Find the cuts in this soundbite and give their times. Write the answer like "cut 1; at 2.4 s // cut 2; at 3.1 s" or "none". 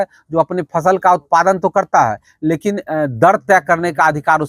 none